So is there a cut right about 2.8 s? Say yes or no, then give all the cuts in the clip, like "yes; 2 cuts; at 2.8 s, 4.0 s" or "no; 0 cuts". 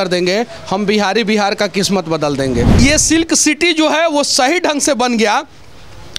yes; 1 cut; at 2.8 s